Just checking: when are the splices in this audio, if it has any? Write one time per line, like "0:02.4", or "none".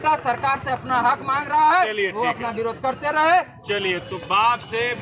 none